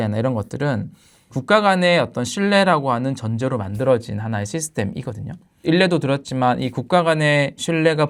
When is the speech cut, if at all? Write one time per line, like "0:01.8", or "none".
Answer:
none

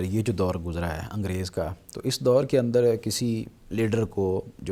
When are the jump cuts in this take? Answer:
none

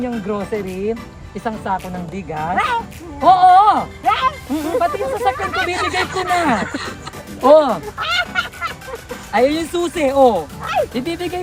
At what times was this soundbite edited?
none

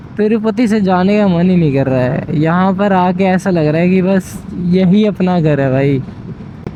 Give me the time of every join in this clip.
none

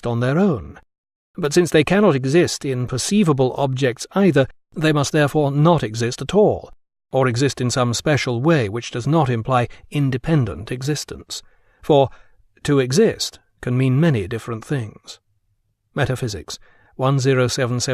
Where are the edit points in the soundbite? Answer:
0:12.4

